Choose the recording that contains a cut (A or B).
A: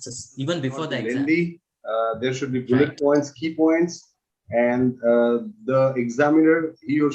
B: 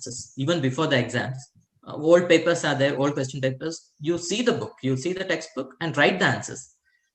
A